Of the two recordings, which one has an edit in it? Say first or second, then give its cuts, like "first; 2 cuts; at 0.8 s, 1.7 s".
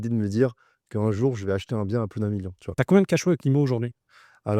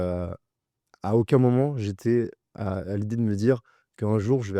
first; 1 cut; at 2.6 s